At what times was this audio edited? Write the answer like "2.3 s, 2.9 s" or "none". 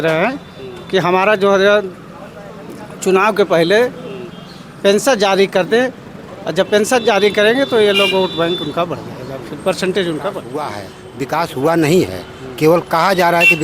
10.8 s